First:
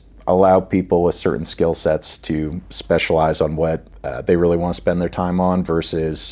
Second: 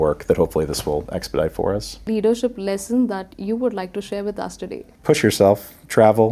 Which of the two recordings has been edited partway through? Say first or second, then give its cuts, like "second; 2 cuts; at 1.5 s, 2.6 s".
second; 1 cut; at 2.1 s